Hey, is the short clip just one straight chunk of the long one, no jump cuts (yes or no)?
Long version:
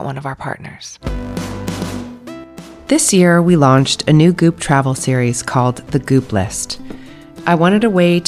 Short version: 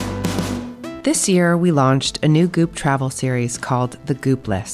no